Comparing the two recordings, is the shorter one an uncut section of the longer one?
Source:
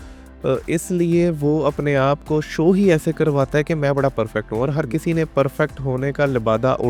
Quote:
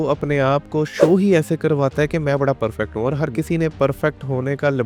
yes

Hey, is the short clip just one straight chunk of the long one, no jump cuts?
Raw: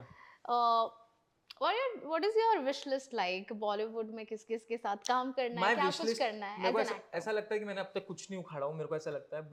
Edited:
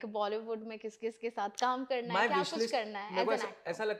yes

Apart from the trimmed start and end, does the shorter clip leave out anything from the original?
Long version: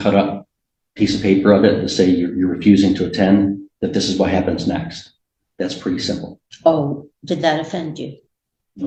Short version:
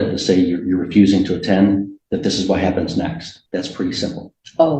yes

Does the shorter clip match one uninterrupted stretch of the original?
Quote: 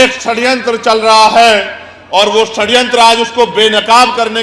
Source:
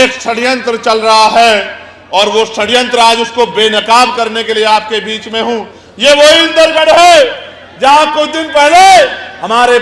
yes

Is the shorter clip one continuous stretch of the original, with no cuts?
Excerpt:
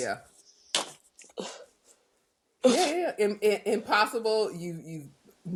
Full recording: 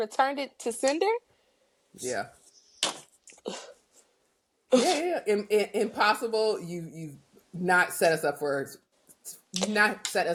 yes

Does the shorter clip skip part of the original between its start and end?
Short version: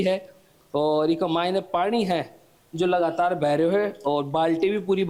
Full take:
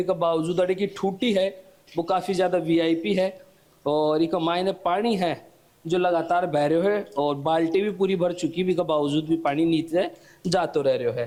no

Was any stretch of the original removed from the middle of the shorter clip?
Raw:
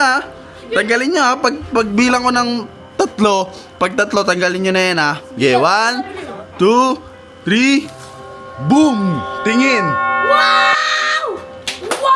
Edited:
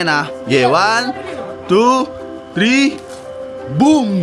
no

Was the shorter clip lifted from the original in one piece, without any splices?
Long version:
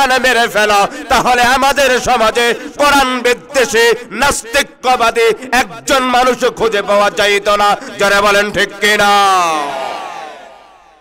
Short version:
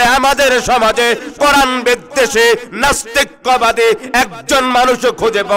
yes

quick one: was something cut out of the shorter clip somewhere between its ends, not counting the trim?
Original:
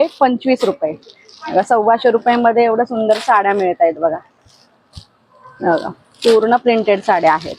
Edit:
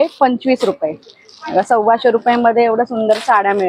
no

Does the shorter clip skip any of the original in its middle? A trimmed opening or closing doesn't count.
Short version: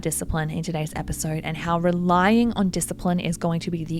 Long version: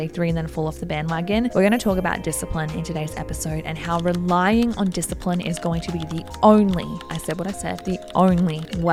no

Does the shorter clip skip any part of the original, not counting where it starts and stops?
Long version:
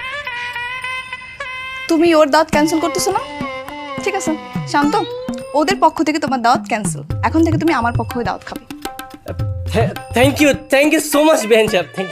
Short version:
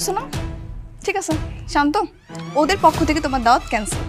no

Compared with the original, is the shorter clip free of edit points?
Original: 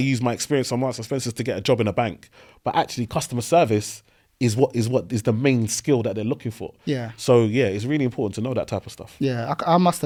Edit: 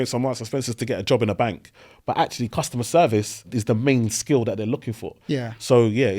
no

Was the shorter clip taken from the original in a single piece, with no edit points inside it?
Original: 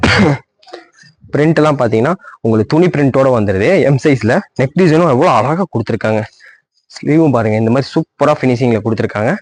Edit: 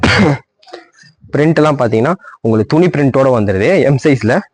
yes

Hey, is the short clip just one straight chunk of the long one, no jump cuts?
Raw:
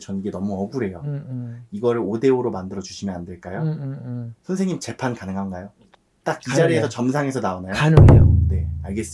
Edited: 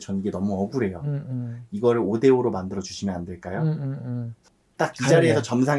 no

